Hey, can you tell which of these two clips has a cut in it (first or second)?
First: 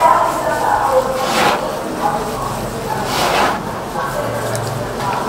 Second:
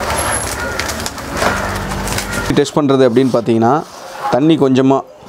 second